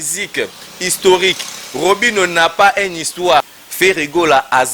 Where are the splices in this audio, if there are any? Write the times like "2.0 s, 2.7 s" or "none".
3.5 s